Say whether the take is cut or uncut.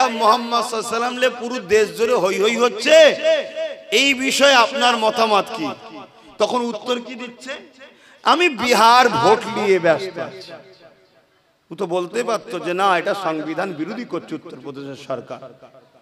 uncut